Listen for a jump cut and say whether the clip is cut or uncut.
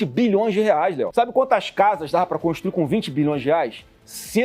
cut